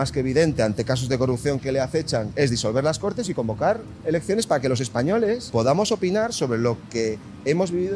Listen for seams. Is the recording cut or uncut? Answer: cut